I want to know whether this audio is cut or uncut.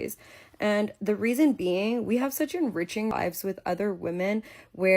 cut